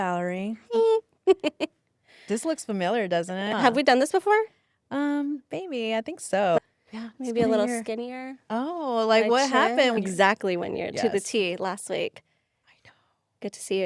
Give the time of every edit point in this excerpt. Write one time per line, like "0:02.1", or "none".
0:03.5
0:06.6
0:10.0